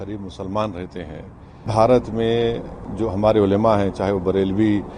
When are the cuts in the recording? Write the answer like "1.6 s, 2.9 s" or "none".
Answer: 1.7 s